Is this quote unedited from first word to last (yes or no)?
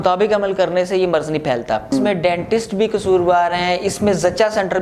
no